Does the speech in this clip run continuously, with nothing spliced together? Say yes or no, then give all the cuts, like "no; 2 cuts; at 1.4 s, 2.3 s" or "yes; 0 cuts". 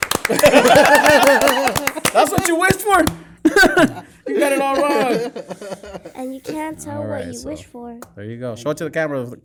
yes; 0 cuts